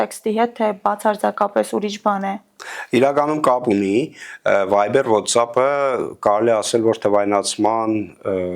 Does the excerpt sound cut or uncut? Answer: uncut